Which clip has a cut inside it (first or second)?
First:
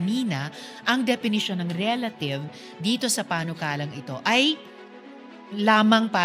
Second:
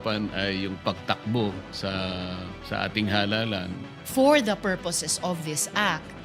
second